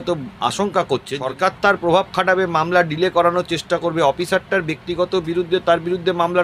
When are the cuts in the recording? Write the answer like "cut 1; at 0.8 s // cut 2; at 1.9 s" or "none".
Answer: cut 1; at 1.2 s